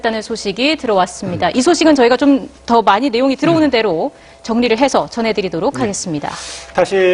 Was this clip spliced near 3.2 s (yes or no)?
no